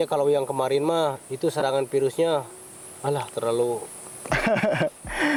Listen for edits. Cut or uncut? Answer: uncut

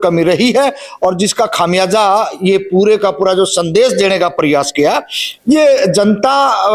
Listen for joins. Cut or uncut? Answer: uncut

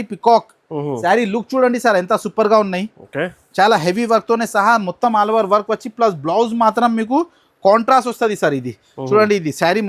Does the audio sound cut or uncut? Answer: uncut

